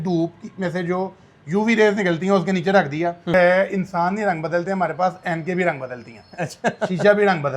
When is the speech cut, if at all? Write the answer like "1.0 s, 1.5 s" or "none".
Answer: 3.3 s